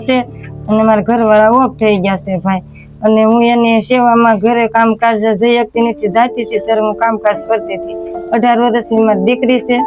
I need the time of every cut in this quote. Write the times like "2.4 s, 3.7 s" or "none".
none